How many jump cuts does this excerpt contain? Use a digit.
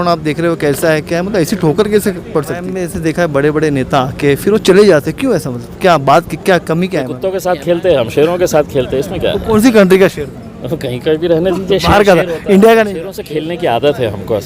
3